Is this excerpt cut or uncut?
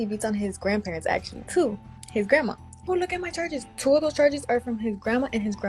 cut